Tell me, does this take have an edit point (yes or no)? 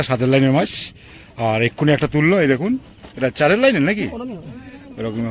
no